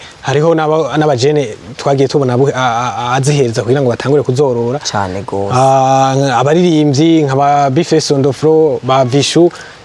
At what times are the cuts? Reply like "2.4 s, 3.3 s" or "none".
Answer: none